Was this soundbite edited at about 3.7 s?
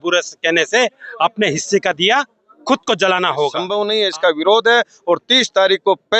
yes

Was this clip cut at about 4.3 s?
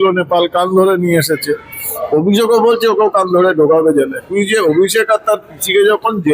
yes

